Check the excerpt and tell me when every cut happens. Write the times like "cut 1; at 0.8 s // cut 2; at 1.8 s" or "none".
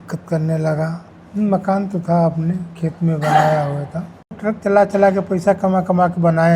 cut 1; at 1.1 s // cut 2; at 4.4 s